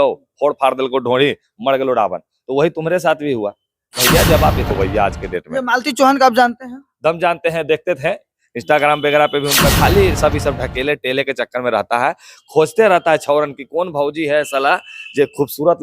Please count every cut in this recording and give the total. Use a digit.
2